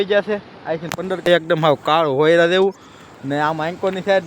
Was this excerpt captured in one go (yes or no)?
no